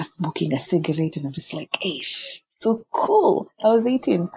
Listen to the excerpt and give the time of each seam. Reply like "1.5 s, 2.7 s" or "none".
none